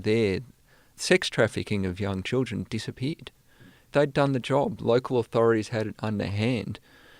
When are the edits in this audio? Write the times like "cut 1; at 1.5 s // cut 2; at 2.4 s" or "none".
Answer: cut 1; at 0.9 s // cut 2; at 3.9 s

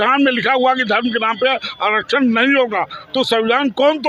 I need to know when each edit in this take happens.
none

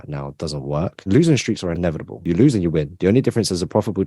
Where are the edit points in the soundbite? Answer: cut 1; at 1.1 s // cut 2; at 2.2 s

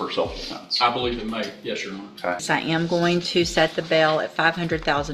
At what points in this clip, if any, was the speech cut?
cut 1; at 2.4 s

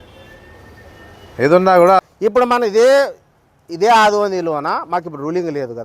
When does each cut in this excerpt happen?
cut 1; at 2.0 s

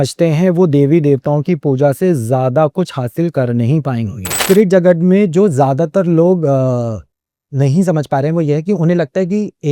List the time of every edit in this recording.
cut 1; at 4.3 s

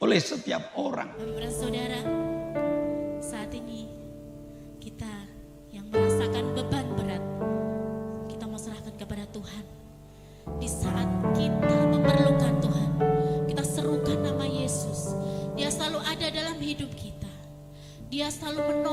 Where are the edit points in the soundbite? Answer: cut 1; at 1.3 s

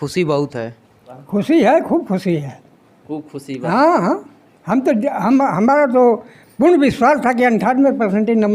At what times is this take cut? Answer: cut 1; at 1.1 s

